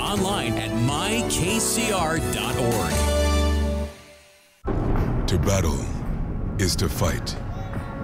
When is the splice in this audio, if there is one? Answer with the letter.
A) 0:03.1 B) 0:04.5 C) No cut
B